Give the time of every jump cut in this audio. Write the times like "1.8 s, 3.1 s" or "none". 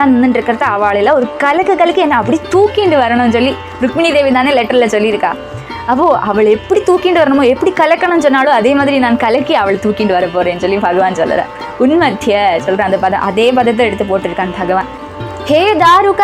15.0 s